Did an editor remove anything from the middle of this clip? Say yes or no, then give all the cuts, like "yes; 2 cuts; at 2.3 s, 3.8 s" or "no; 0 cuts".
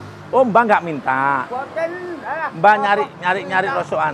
no; 0 cuts